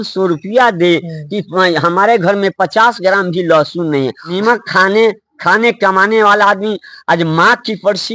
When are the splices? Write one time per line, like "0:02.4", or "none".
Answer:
0:04.3